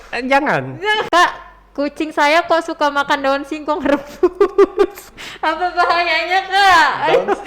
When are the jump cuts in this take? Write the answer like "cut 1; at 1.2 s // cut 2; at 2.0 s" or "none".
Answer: cut 1; at 1.1 s